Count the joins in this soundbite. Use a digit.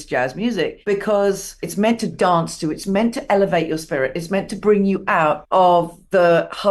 3